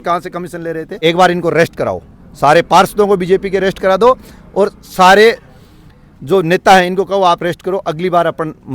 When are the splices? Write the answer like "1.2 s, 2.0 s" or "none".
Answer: 1.0 s